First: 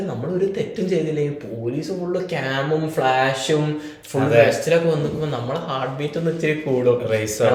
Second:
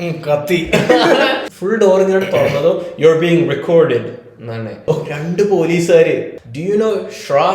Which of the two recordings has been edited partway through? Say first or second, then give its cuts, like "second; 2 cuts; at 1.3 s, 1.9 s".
second; 3 cuts; at 1.5 s, 4.9 s, 6.4 s